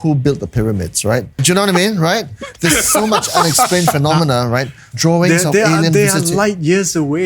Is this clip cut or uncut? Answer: cut